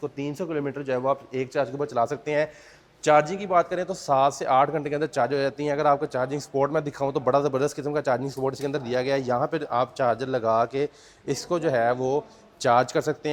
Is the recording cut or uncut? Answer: uncut